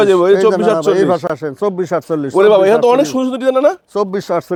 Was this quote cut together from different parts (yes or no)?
no